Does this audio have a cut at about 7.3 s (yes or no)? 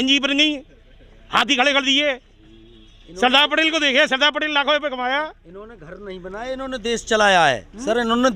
no